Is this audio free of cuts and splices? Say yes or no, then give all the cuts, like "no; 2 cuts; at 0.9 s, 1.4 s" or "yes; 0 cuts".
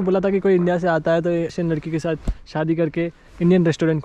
no; 1 cut; at 1.5 s